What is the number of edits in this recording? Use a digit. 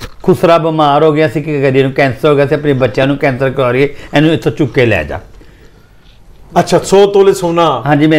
1